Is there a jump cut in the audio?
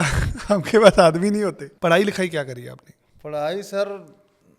yes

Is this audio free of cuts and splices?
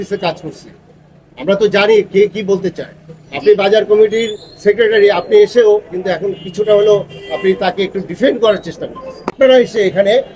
no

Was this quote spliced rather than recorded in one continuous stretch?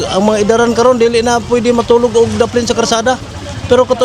no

